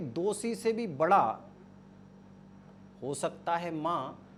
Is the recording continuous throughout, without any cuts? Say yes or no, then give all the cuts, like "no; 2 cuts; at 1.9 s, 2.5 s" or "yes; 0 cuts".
yes; 0 cuts